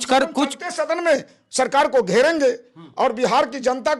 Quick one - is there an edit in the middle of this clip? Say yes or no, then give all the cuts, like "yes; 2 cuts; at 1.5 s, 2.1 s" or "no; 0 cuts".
no; 0 cuts